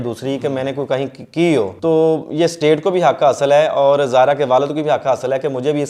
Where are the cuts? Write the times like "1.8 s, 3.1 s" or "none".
1.7 s